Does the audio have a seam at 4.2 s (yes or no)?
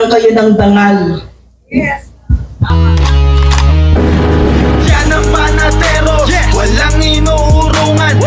no